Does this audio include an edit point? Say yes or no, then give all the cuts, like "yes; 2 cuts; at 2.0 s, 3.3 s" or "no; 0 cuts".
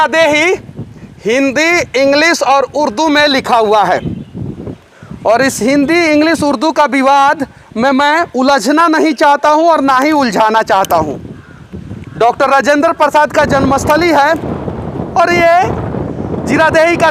no; 0 cuts